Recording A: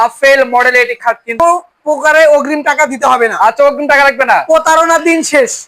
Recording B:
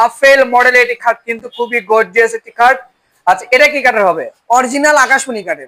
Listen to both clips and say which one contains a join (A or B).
A